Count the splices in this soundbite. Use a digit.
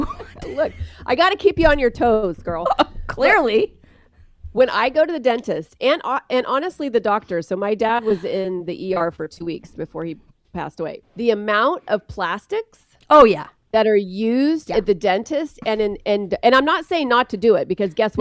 1